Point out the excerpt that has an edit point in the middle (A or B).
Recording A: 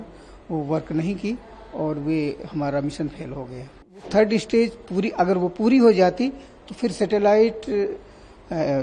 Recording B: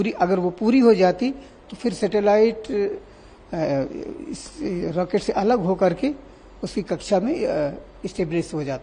A